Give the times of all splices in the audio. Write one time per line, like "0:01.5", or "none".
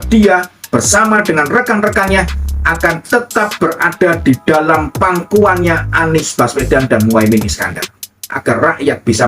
0:08.3